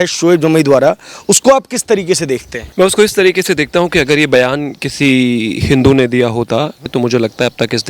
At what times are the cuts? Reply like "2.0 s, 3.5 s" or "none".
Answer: 2.6 s, 6.9 s